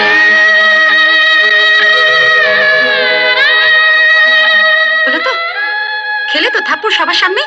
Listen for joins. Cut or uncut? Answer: uncut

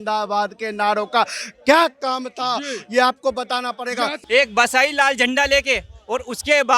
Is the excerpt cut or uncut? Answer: cut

